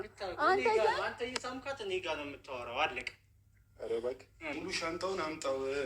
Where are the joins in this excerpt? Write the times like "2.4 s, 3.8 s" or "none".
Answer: 4.6 s